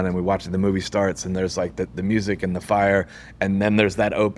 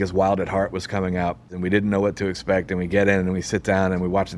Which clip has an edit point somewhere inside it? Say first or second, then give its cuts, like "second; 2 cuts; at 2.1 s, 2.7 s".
second; 1 cut; at 1.5 s